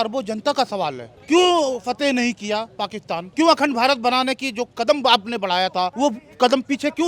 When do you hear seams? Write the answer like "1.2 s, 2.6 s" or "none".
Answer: 1.1 s, 3.3 s, 5.9 s